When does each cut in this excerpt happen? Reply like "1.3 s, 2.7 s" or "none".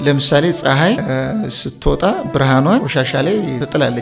1.0 s, 3.1 s